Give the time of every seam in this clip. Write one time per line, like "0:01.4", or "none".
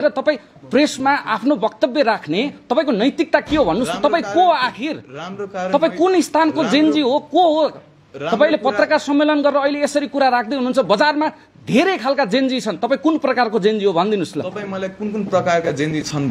none